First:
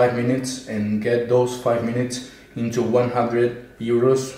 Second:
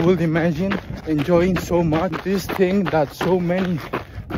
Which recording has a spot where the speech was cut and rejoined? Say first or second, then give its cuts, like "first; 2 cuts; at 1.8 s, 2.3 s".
second; 2 cuts; at 0.9 s, 2.2 s